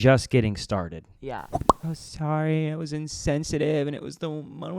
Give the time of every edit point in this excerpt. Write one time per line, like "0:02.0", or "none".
0:01.6